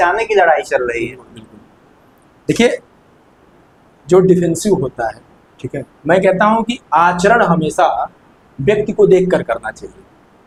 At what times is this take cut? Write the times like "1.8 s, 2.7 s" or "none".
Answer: none